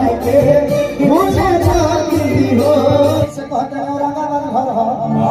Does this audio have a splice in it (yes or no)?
no